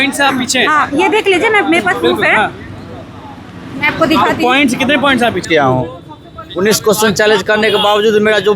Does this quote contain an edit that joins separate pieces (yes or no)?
yes